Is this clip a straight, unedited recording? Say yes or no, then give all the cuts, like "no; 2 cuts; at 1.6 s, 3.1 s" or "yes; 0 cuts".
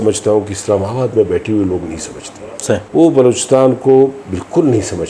no; 1 cut; at 2.8 s